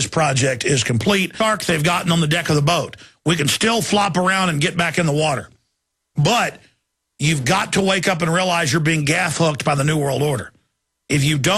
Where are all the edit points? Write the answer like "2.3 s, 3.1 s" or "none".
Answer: none